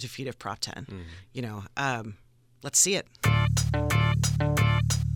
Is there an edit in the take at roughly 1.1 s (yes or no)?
no